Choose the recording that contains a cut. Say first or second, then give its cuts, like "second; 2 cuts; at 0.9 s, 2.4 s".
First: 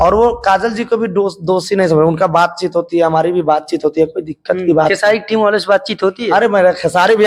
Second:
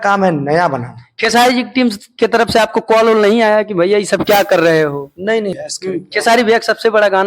second; 1 cut; at 5.7 s